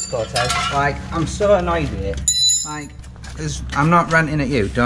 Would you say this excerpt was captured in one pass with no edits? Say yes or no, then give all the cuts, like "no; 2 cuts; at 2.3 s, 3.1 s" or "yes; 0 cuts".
yes; 0 cuts